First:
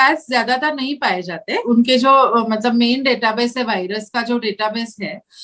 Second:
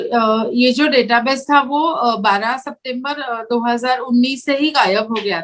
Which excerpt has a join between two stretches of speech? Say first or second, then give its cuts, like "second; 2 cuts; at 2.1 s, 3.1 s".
first; 1 cut; at 1.5 s